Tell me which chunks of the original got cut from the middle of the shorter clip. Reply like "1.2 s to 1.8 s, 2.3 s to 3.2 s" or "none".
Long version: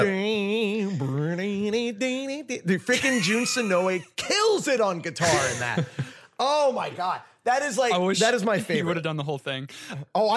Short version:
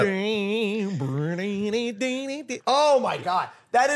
2.5 s to 6.2 s